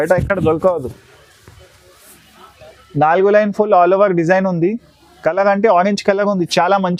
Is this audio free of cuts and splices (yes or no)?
yes